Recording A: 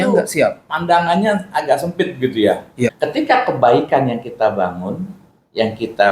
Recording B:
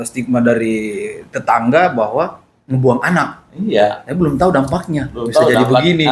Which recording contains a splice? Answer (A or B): A